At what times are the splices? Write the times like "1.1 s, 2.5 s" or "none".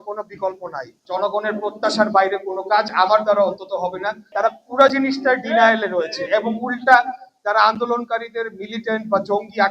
1.0 s, 4.2 s

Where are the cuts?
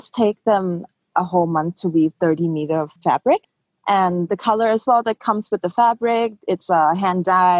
4.3 s

